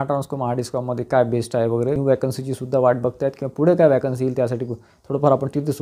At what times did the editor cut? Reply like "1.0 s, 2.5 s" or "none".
2.0 s